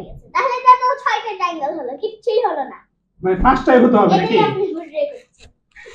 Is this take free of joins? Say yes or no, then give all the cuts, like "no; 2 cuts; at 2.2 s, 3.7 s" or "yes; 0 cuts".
yes; 0 cuts